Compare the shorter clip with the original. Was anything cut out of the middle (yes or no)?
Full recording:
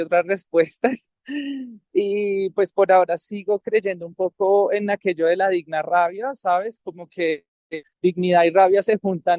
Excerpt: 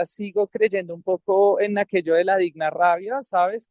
no